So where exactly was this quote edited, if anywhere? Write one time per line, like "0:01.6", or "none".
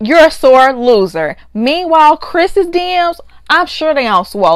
none